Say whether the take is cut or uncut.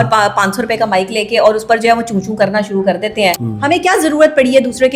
cut